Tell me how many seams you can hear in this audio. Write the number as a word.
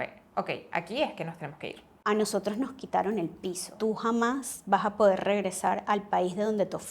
two